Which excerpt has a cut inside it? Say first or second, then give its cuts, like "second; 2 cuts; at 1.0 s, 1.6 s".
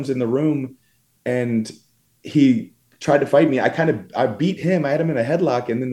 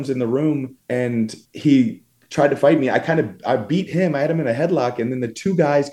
second; 1 cut; at 1.1 s